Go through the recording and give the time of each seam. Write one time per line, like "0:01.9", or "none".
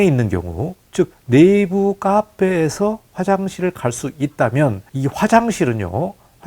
0:01.0
0:04.9